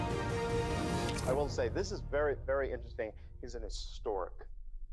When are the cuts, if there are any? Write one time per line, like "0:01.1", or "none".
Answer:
none